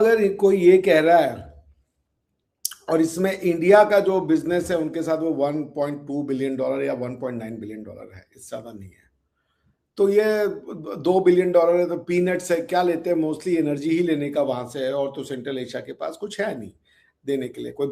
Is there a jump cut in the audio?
no; 0 cuts

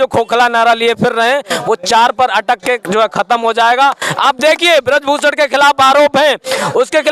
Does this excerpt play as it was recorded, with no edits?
yes; 0 cuts

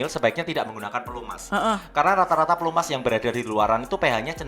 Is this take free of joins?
yes; 0 cuts

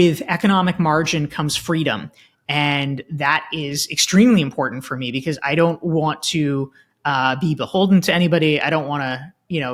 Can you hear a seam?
no; 0 cuts

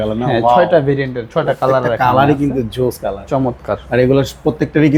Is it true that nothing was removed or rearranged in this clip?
yes; 0 cuts

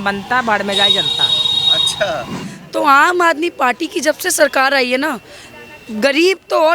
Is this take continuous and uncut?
no; 1 cut; at 2.4 s

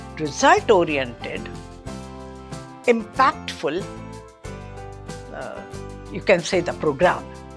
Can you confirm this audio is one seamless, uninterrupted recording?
yes; 0 cuts

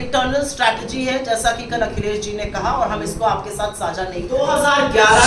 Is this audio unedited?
no; 1 cut; at 4.3 s

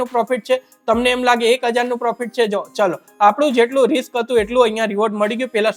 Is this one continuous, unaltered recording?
yes; 0 cuts

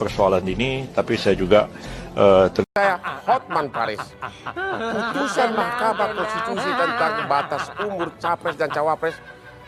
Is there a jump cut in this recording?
yes; 1 cut; at 2.6 s

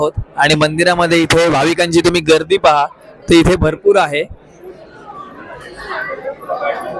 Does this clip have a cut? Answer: no; 0 cuts

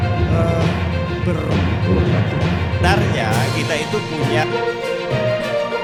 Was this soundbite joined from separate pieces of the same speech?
no; 0 cuts

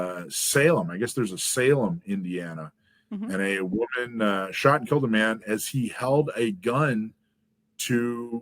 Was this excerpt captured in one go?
yes; 0 cuts

